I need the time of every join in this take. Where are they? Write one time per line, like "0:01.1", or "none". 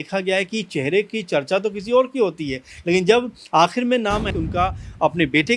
0:04.3